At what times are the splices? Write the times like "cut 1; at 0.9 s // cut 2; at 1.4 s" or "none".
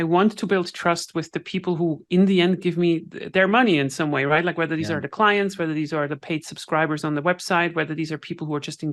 none